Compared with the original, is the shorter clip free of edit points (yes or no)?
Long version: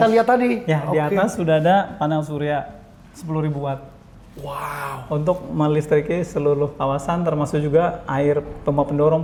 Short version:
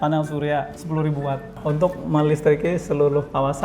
no